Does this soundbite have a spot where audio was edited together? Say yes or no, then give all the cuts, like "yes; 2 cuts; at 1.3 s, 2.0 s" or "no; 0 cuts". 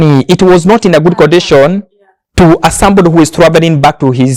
no; 0 cuts